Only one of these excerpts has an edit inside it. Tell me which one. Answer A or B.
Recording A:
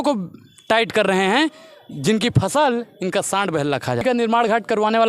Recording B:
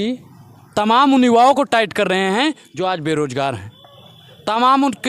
A